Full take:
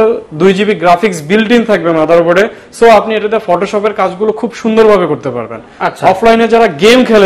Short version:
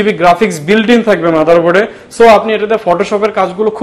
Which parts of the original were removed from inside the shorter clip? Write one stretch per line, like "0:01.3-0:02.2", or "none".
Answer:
none